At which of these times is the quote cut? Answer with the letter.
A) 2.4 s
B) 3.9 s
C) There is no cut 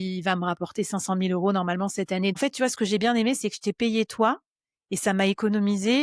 A